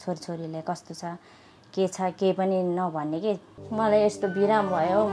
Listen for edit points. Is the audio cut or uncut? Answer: cut